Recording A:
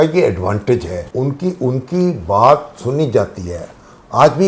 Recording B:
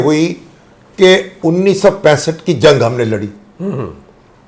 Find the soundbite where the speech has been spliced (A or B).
A